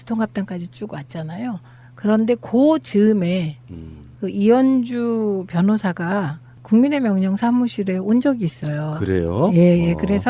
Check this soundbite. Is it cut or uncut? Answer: cut